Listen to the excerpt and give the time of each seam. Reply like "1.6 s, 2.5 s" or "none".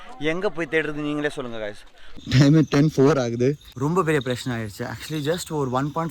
2.2 s, 3.7 s